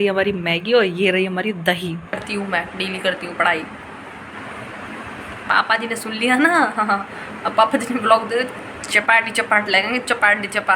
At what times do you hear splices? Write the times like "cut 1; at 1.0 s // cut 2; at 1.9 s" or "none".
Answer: cut 1; at 2.2 s